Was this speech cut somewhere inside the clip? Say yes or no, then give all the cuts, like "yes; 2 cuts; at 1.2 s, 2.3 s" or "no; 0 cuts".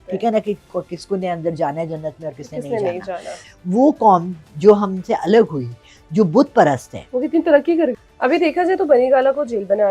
yes; 2 cuts; at 3.4 s, 8.0 s